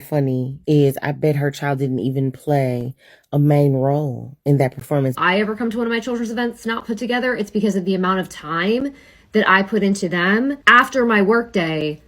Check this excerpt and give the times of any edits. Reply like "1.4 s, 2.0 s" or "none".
5.2 s, 10.6 s